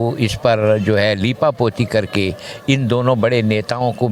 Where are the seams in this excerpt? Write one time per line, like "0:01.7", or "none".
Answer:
none